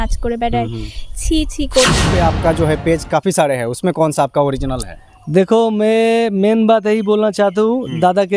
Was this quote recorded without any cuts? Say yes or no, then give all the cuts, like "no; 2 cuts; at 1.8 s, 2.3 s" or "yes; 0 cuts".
no; 1 cut; at 2.0 s